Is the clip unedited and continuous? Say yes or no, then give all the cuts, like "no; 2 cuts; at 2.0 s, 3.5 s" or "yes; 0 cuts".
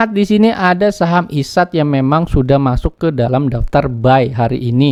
yes; 0 cuts